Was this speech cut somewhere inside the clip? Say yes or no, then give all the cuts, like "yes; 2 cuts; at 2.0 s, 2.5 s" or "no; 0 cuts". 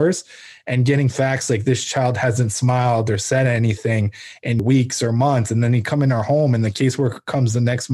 yes; 1 cut; at 4.6 s